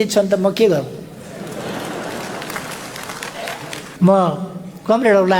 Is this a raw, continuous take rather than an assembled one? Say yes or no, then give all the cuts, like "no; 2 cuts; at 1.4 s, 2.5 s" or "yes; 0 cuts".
yes; 0 cuts